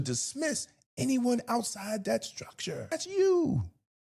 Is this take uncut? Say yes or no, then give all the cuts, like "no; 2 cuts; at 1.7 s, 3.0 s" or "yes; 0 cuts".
no; 1 cut; at 2.9 s